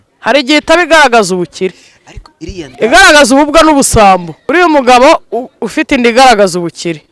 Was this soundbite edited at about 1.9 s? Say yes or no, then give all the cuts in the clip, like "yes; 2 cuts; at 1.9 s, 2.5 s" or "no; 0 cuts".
no; 1 cut; at 4.3 s